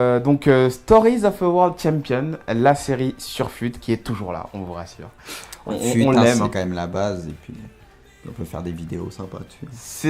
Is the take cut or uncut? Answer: uncut